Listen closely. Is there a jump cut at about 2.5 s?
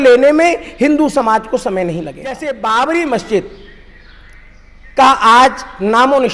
yes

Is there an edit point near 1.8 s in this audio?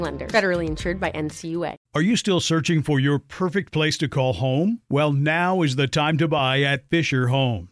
yes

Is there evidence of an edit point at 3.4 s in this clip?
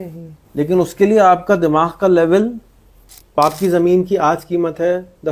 yes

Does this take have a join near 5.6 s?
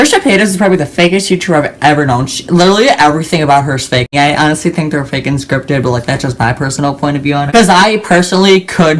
no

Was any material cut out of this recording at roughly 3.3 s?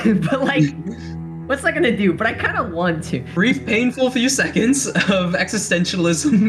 yes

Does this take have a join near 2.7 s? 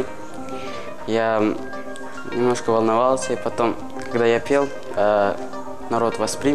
no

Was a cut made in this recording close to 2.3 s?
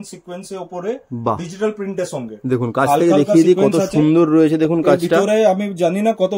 no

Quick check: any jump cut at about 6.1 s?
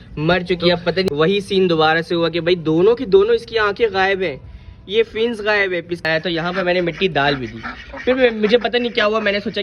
yes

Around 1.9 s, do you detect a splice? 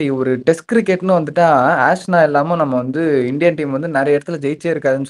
no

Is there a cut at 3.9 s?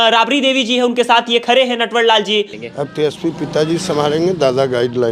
no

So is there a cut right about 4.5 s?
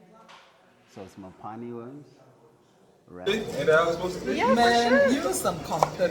no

